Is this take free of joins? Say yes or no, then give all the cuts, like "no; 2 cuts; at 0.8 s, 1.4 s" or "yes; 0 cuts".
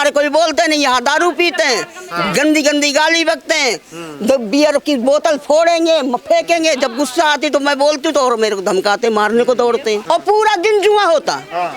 no; 1 cut; at 10.0 s